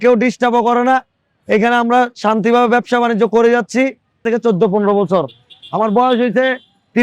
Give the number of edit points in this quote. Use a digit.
1